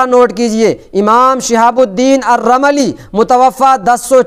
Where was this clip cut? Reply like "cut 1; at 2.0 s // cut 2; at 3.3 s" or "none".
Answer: none